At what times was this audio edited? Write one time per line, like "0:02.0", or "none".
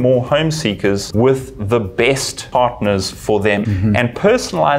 0:01.1
0:02.3
0:03.7